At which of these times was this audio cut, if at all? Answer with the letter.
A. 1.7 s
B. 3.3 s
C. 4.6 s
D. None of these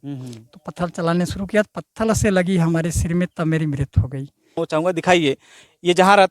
C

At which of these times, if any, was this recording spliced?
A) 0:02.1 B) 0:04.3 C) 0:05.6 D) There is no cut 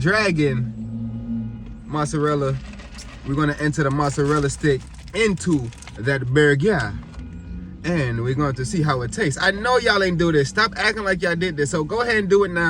D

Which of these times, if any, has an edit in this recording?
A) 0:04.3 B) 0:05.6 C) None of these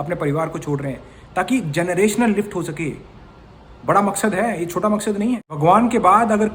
B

